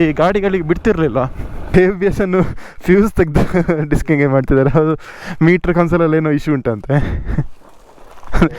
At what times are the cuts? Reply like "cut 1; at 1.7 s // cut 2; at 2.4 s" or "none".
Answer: cut 1; at 1.6 s